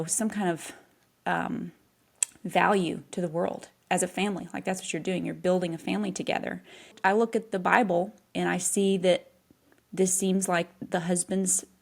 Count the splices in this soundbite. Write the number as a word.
one